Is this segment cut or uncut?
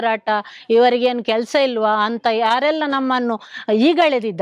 uncut